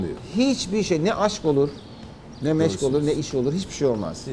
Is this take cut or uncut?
uncut